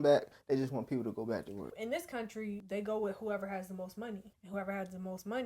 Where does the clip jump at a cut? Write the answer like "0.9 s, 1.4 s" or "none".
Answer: 1.7 s, 2.6 s, 4.3 s